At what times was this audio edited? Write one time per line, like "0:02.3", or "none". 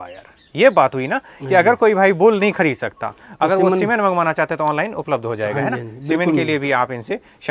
none